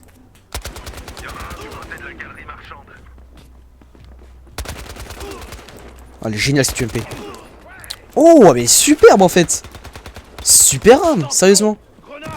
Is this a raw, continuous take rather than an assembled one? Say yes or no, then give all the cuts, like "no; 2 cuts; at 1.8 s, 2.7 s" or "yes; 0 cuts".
no; 1 cut; at 1.0 s